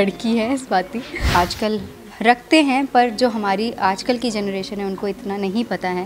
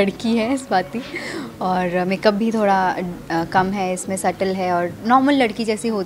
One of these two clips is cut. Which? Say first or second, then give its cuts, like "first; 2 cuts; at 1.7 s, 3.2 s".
first; 1 cut; at 1.2 s